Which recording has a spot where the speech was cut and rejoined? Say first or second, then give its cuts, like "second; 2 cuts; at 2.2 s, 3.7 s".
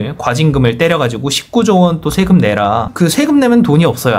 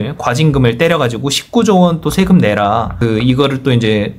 first; 1 cut; at 2.9 s